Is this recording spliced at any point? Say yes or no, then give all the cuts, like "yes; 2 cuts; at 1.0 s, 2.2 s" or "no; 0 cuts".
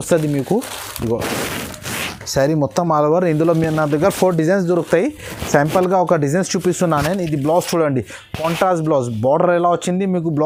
no; 0 cuts